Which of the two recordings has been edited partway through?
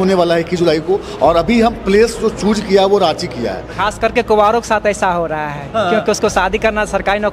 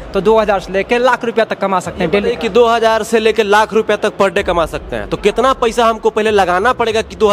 first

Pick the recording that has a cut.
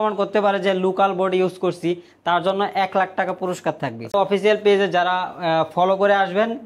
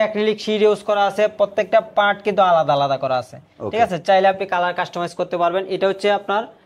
first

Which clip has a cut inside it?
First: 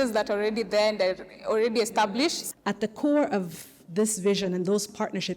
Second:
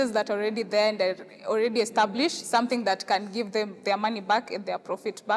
first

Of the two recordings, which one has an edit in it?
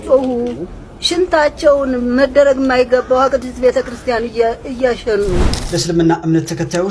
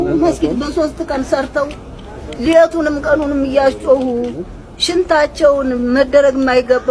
first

